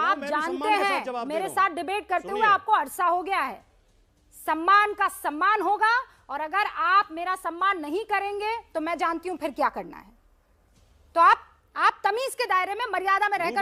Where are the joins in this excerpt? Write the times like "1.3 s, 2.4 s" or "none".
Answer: none